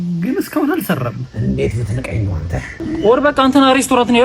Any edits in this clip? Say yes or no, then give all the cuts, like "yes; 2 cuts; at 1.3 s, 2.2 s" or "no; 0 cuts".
yes; 1 cut; at 2.8 s